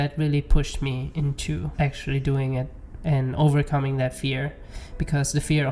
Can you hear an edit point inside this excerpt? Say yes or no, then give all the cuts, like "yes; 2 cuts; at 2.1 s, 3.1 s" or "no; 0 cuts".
no; 0 cuts